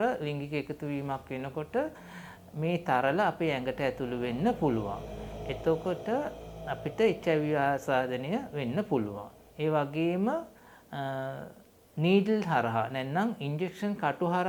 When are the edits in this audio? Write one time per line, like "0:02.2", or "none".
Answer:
none